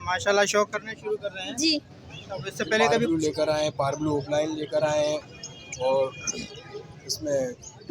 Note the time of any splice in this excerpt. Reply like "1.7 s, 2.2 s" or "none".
3.1 s